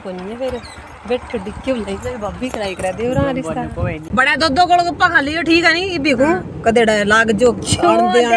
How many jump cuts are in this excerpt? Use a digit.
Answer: 1